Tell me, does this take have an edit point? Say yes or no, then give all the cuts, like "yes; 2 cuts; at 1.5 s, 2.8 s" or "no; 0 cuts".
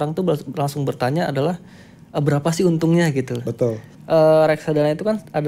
yes; 1 cut; at 3.9 s